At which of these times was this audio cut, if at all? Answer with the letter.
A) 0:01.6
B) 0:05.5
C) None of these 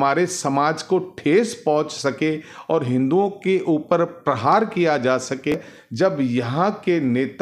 B